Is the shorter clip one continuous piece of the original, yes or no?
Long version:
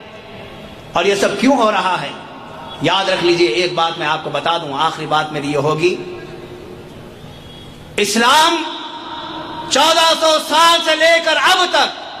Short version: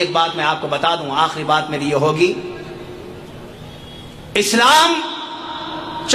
yes